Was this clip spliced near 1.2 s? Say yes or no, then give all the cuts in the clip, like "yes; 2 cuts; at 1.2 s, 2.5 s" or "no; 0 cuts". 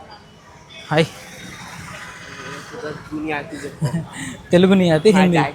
no; 0 cuts